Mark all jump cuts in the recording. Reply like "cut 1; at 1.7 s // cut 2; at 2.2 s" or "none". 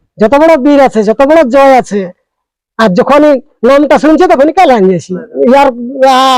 cut 1; at 5.2 s